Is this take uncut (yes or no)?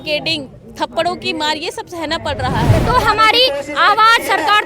no